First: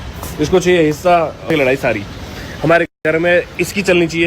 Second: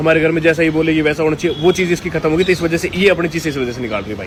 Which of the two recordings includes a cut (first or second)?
first